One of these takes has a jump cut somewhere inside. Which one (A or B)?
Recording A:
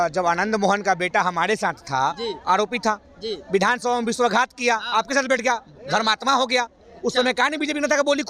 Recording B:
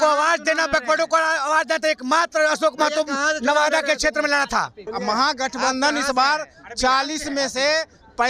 B